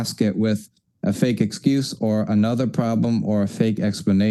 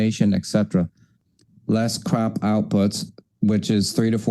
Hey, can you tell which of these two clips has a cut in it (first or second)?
second